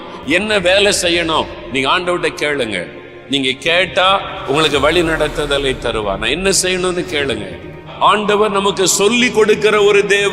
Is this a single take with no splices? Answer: no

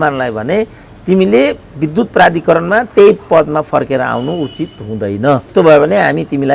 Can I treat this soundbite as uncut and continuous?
no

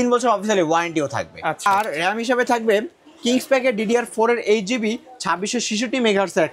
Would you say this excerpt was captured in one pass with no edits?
no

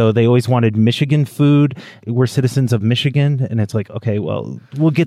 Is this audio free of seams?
no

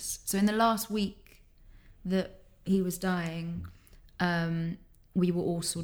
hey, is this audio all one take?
yes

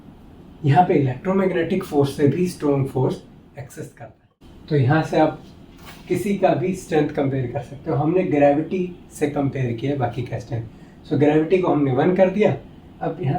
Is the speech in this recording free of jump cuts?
no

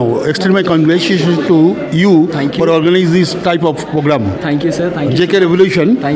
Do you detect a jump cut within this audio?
no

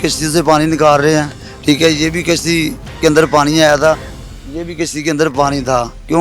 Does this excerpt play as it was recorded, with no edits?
yes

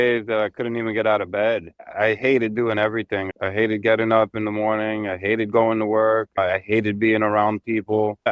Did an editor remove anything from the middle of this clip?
yes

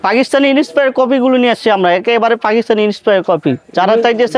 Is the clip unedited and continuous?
yes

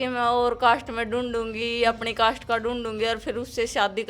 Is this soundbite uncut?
yes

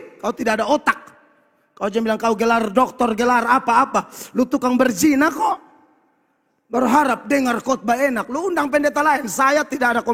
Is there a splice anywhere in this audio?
no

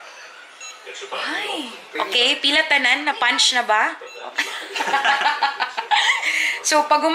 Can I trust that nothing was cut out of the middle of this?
no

